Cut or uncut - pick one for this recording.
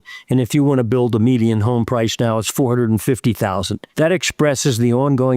cut